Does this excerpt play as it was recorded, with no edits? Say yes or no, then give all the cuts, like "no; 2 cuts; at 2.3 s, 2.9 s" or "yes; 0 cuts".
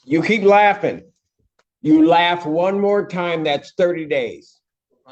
yes; 0 cuts